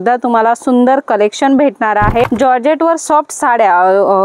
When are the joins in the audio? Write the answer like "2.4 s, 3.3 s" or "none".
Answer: 2.2 s